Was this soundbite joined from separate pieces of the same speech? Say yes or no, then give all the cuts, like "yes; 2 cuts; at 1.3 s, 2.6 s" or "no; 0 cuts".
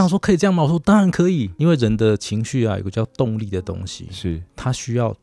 yes; 1 cut; at 1.5 s